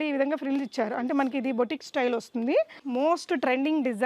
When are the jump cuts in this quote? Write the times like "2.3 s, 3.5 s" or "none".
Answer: 2.8 s